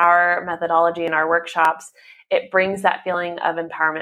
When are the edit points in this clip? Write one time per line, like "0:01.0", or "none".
none